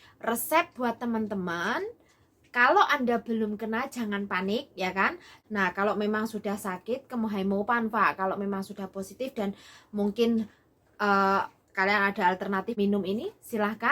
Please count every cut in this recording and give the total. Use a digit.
2